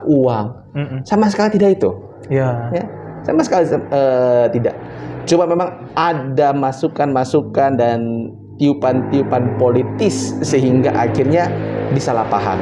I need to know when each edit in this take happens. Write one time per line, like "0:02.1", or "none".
none